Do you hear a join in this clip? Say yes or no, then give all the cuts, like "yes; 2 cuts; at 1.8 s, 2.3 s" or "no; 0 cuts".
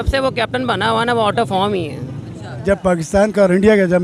yes; 1 cut; at 2.6 s